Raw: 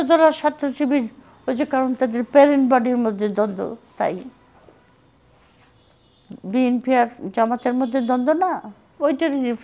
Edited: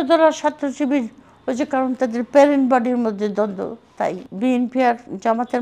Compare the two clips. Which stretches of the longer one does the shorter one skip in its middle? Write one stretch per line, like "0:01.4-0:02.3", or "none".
0:04.3-0:06.4